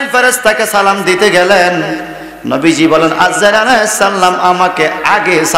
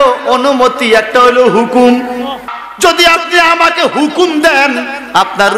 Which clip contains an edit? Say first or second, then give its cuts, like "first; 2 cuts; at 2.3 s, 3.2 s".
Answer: second; 1 cut; at 2.6 s